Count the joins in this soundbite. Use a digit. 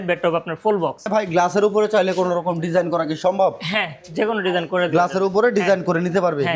1